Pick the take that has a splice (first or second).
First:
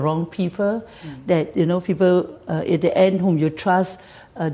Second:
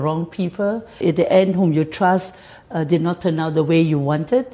second